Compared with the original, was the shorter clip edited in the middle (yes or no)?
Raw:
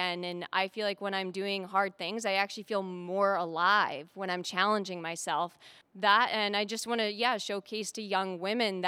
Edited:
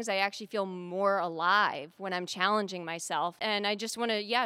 yes